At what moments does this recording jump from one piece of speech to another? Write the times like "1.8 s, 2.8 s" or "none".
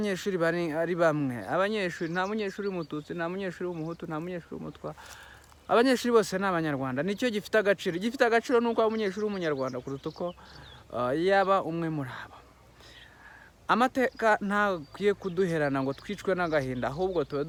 none